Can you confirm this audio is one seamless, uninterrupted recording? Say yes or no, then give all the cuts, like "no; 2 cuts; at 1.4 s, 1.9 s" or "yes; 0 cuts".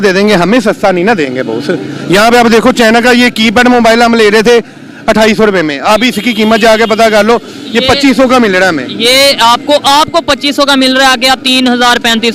yes; 0 cuts